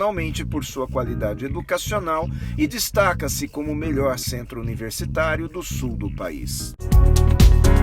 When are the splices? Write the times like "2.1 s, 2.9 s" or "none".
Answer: 6.9 s